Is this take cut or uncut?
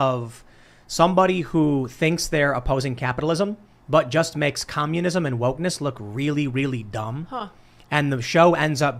uncut